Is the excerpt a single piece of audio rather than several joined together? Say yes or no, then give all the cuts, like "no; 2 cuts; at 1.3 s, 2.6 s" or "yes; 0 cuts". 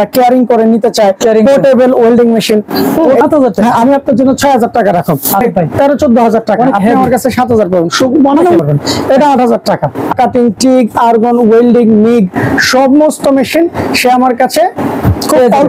no; 4 cuts; at 3.2 s, 5.4 s, 8.6 s, 10.1 s